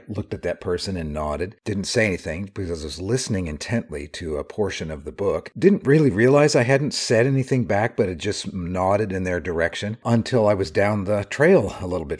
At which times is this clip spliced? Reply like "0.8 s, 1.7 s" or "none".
none